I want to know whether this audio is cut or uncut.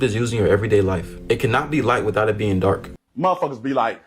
cut